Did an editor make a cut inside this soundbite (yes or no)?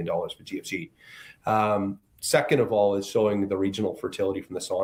no